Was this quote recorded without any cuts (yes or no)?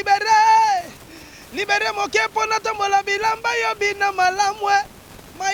yes